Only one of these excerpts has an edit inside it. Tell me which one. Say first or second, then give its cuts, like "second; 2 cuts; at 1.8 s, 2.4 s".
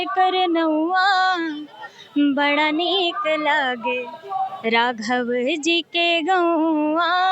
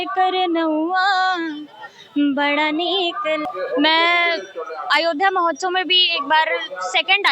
second; 1 cut; at 3.4 s